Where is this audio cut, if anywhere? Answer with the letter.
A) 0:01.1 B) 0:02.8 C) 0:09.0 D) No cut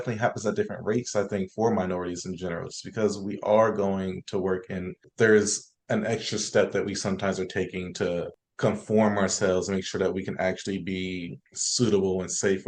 D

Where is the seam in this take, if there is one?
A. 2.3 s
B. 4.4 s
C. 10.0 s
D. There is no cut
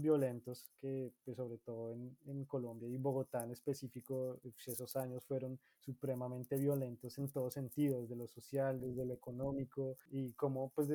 C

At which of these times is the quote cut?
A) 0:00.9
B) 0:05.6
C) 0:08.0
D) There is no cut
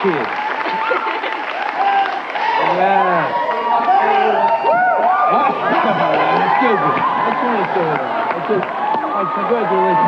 B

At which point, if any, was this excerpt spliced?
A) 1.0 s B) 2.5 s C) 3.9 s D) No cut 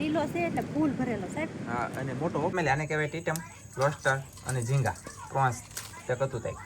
B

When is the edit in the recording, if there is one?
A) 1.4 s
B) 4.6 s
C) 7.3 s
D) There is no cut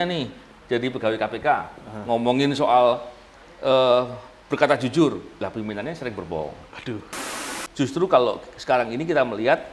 C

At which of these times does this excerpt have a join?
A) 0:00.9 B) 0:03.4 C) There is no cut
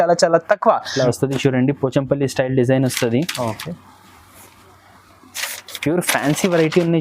A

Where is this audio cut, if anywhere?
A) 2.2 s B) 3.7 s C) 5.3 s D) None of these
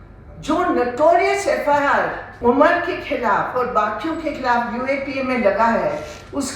A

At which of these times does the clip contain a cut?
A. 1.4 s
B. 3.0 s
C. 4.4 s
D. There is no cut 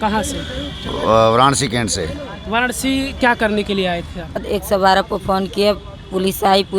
C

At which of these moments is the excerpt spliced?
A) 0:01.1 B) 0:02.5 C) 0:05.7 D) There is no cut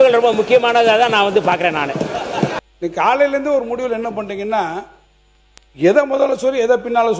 B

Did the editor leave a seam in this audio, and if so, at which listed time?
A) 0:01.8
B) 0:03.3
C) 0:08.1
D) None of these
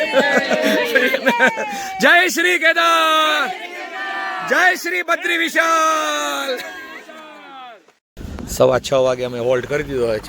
C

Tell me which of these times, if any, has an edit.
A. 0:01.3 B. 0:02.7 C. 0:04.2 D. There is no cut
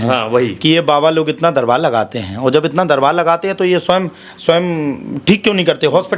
D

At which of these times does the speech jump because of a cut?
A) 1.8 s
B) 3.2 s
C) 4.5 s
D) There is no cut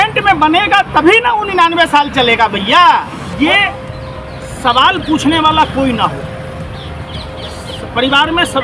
B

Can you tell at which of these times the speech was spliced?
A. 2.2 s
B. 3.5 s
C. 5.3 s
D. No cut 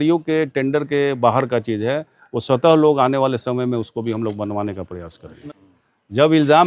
C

